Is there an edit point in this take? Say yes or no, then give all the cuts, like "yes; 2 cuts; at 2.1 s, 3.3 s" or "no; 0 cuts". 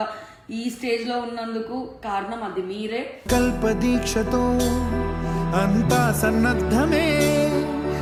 no; 0 cuts